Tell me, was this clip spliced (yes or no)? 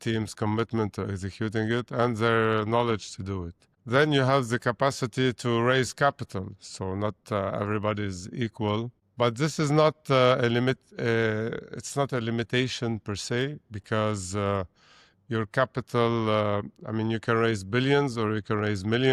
no